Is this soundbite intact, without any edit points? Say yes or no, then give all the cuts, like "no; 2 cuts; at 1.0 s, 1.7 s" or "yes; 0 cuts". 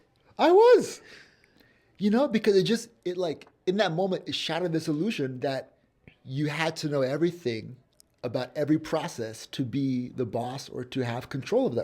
yes; 0 cuts